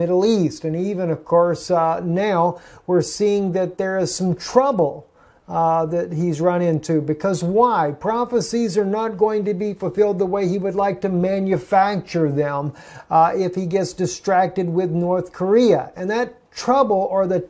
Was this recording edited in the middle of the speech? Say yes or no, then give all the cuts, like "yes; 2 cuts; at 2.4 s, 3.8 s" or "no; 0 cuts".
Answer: yes; 1 cut; at 5.9 s